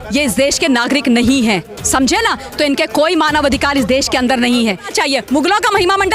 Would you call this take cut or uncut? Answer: cut